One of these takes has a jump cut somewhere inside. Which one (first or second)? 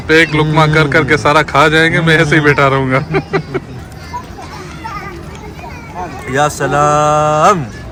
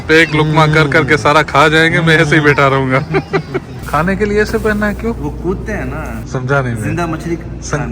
second